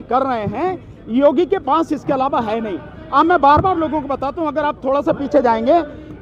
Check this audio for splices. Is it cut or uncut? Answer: uncut